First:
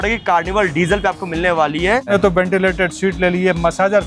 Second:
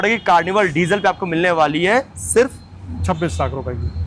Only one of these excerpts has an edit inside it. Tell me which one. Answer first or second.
first